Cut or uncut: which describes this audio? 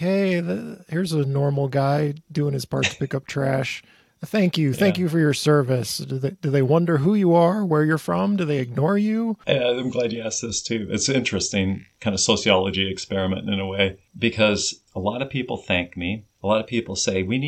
cut